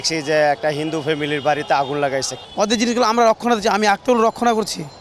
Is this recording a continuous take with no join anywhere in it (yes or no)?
no